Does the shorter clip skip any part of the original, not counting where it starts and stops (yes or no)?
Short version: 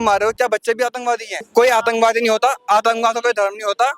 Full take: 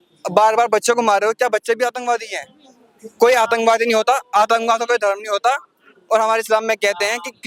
yes